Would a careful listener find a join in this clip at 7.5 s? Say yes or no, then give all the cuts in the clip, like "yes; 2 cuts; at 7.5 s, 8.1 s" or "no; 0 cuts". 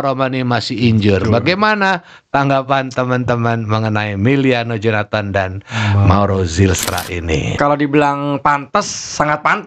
yes; 1 cut; at 7.5 s